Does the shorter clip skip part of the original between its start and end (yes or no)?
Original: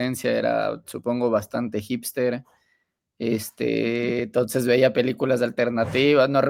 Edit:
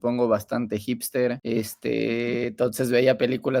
yes